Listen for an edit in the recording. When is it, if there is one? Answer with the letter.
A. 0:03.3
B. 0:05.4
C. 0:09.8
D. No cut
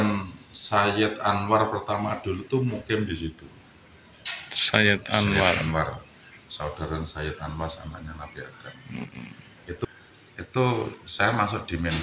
C